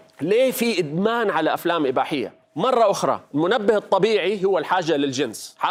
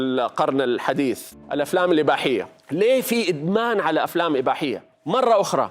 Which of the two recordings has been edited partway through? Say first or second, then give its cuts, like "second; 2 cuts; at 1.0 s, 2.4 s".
second; 1 cut; at 1.3 s